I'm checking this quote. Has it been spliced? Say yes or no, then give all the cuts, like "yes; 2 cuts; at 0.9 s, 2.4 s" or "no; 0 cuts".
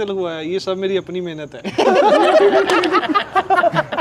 no; 0 cuts